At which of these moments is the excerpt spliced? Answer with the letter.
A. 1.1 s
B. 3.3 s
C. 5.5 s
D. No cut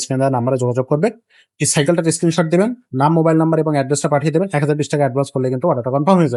D